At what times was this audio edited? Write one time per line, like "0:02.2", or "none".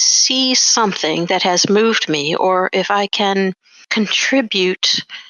0:03.7